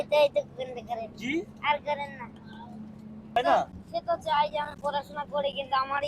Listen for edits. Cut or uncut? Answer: cut